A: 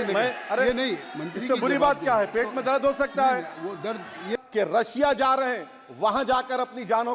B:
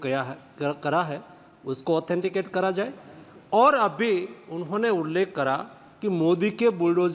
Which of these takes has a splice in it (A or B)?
A